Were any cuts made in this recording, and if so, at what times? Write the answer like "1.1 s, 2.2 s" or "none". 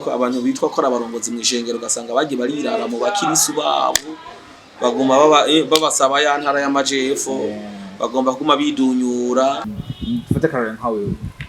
9.8 s